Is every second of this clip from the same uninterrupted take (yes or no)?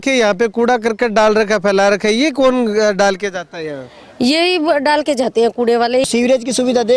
no